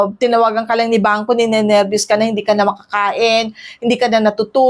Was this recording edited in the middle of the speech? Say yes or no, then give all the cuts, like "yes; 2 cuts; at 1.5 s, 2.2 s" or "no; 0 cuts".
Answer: no; 0 cuts